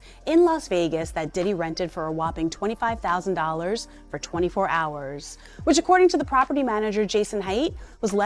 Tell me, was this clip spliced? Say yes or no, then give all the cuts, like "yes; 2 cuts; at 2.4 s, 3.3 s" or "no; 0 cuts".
no; 0 cuts